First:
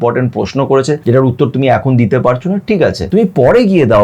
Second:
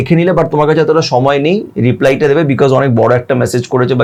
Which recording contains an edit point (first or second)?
first